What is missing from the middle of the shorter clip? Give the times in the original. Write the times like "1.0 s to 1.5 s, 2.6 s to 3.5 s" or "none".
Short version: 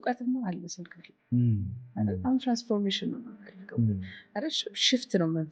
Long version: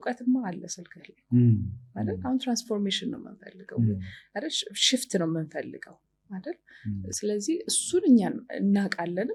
none